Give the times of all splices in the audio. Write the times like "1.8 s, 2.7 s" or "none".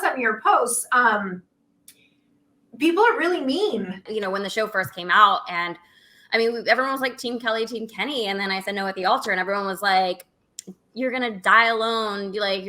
4.1 s

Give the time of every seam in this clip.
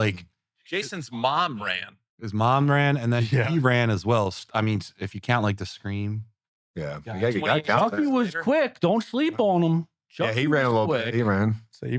none

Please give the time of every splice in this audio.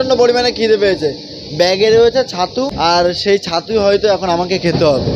2.1 s

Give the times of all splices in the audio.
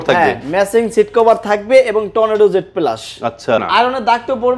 3.6 s

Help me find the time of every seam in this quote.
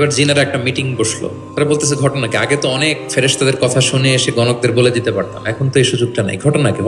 1.4 s

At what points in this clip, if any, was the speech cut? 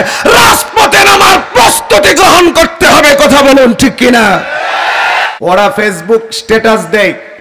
5.3 s

